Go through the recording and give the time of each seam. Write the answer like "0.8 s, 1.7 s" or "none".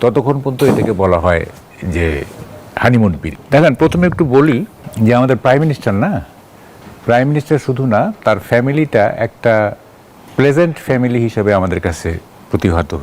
3.2 s, 4.8 s